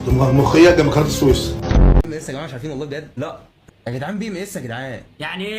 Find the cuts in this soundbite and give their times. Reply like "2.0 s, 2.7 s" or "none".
2.1 s